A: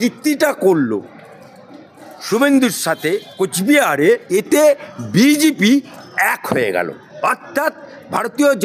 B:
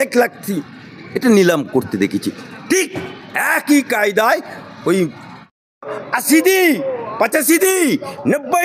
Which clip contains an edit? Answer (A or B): A